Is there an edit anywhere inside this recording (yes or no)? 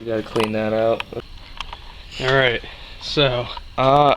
yes